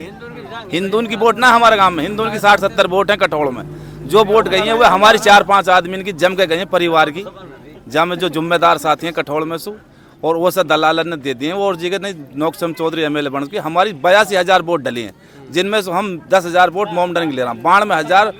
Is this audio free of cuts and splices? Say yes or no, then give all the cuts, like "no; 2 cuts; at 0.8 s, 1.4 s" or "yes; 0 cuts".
yes; 0 cuts